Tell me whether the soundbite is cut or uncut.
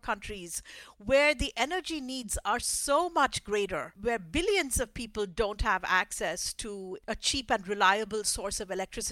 cut